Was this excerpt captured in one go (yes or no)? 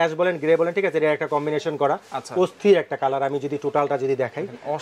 yes